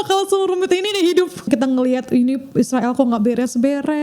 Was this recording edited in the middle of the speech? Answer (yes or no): yes